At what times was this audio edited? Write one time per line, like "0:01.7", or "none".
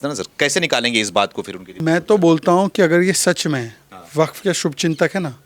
0:01.8